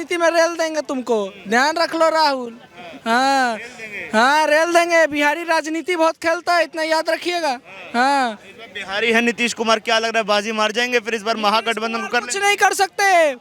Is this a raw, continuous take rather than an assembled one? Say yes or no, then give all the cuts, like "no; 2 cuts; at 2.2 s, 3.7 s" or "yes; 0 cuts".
yes; 0 cuts